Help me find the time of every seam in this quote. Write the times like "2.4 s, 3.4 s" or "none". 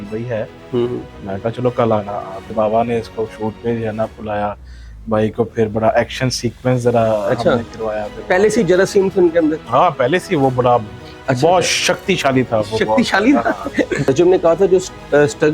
2.5 s, 14.1 s